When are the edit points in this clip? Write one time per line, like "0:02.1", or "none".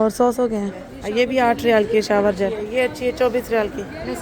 0:01.0
0:02.7